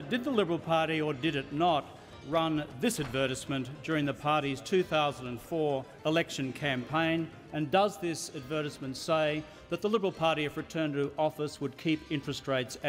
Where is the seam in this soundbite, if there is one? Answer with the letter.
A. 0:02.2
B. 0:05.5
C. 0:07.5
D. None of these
D